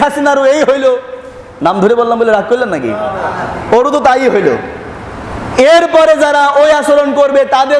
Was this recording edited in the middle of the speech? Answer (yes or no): no